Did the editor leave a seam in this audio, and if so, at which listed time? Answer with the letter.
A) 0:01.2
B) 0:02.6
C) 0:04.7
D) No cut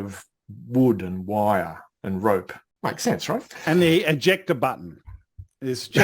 B